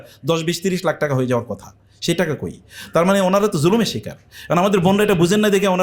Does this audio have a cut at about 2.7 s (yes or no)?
no